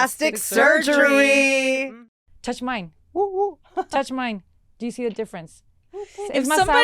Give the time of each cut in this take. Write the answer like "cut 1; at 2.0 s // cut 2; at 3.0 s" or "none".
cut 1; at 1.9 s

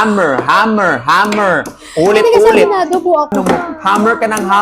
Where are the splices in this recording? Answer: cut 1; at 3.4 s

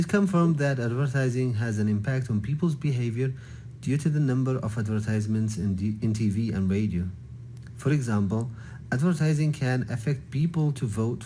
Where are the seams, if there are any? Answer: cut 1; at 5.7 s // cut 2; at 6.9 s // cut 3; at 8.3 s

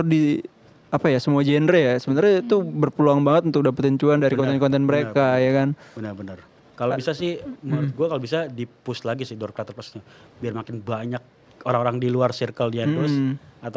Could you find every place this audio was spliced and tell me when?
none

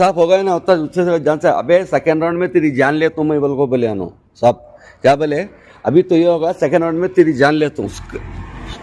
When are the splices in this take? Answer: none

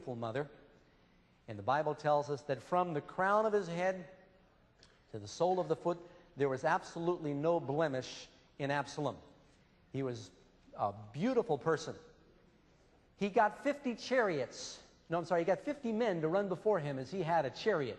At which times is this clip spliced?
cut 1; at 16.5 s

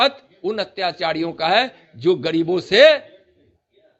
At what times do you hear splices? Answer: none

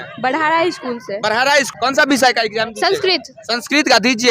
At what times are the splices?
cut 1; at 1.7 s

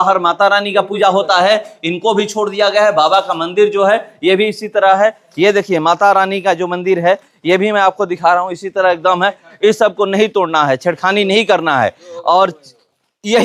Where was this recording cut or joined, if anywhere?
none

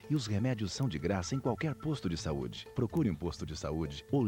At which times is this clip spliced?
cut 1; at 2.6 s

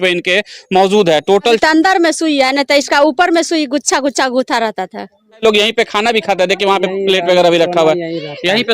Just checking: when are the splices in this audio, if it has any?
cut 1; at 1.6 s // cut 2; at 5.4 s

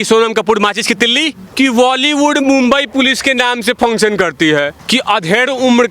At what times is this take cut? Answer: cut 1; at 1.4 s // cut 2; at 4.8 s

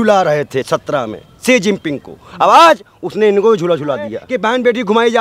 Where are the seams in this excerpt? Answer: cut 1; at 4.2 s

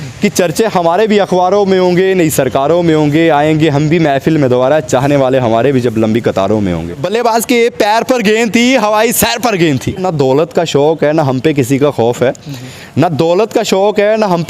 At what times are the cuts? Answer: cut 1; at 6.9 s // cut 2; at 10.1 s

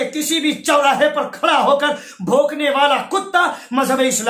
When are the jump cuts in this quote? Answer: none

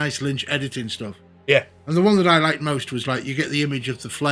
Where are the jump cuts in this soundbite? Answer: none

